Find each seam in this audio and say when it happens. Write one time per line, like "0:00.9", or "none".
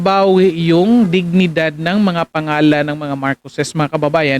none